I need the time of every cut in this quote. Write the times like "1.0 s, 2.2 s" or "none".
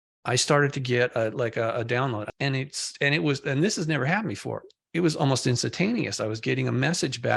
2.2 s